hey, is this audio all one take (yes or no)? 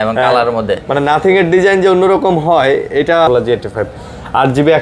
no